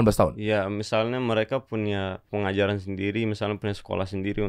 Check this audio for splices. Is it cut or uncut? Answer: cut